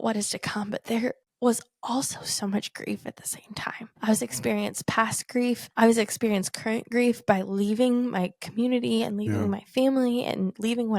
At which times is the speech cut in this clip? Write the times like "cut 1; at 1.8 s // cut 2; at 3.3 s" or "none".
cut 1; at 1.3 s // cut 2; at 3.9 s // cut 3; at 5.7 s